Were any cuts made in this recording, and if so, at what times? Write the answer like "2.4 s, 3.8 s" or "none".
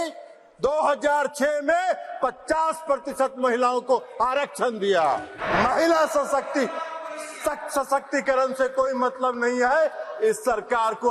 5.4 s